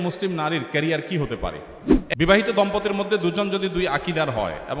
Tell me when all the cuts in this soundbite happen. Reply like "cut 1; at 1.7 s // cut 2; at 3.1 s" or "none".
cut 1; at 2.0 s